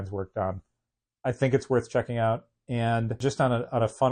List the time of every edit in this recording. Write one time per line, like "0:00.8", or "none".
0:03.2